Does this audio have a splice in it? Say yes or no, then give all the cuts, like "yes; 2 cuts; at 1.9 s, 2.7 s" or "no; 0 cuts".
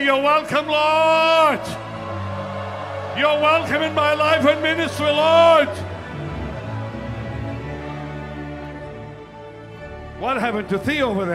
no; 0 cuts